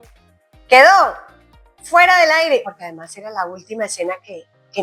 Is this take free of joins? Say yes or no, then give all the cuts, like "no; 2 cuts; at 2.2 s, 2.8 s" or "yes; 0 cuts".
no; 1 cut; at 2.7 s